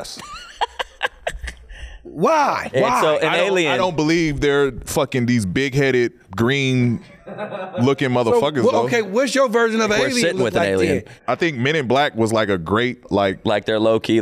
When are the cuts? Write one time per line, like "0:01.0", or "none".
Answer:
0:02.6
0:11.2
0:13.0